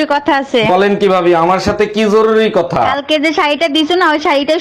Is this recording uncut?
yes; 0 cuts

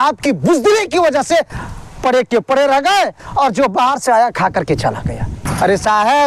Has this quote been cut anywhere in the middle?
yes; 1 cut; at 5.3 s

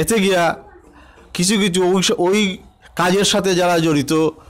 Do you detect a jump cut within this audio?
no; 0 cuts

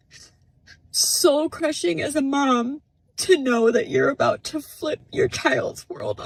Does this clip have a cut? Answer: no; 0 cuts

